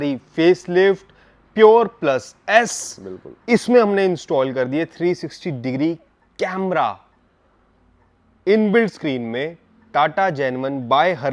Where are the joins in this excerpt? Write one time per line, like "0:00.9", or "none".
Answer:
none